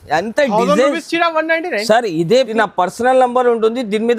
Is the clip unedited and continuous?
no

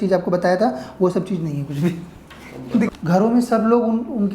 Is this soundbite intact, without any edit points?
no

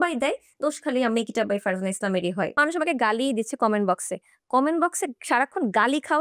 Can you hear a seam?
yes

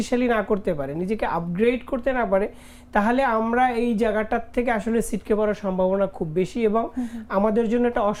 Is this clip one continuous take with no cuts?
yes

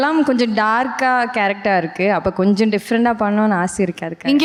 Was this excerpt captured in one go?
yes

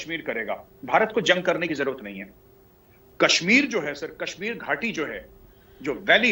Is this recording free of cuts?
yes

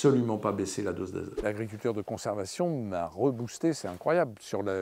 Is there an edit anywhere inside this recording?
yes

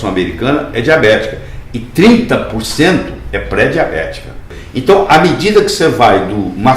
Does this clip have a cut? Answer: yes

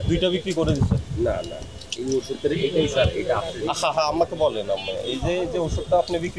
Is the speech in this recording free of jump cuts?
yes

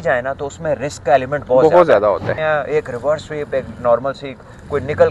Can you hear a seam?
yes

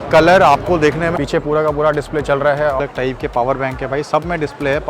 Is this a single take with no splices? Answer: no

